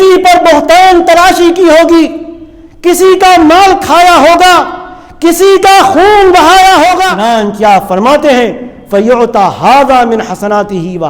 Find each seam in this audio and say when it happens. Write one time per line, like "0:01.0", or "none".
0:07.1